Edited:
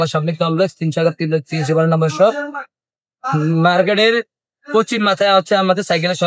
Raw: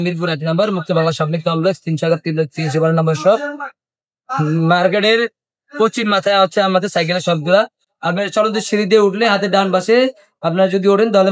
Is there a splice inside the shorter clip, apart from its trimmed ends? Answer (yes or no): no